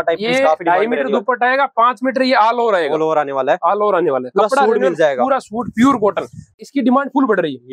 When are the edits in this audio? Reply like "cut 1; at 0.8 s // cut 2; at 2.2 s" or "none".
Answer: cut 1; at 6.6 s